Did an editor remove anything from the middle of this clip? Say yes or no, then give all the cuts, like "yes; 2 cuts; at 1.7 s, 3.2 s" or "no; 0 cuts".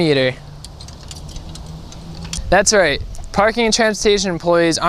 yes; 1 cut; at 2.4 s